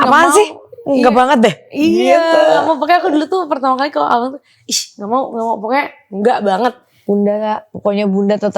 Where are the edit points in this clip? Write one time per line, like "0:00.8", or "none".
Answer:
0:06.9